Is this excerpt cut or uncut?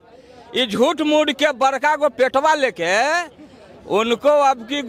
uncut